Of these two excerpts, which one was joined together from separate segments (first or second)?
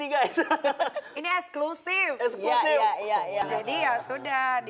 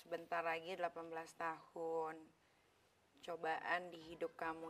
first